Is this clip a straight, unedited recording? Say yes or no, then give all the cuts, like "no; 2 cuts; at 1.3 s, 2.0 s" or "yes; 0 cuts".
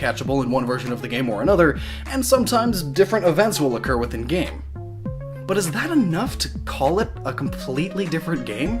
no; 1 cut; at 5.6 s